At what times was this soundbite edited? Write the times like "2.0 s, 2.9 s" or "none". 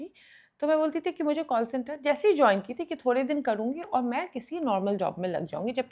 none